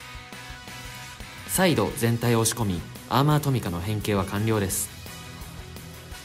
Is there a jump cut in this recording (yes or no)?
yes